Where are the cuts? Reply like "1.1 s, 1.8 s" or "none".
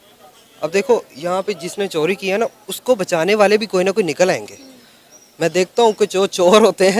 none

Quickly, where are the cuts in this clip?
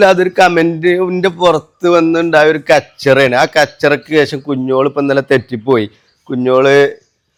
none

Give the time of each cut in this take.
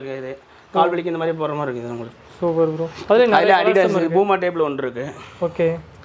none

